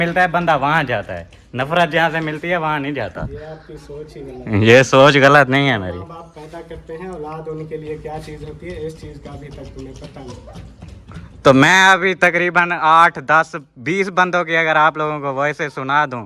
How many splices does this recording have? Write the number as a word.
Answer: zero